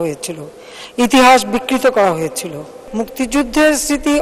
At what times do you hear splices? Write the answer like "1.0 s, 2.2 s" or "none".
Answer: 2.9 s